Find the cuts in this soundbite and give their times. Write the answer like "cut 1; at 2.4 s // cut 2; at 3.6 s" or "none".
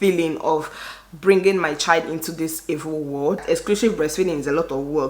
cut 1; at 3.4 s